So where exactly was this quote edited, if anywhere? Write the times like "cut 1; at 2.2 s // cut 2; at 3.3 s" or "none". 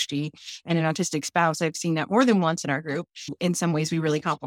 none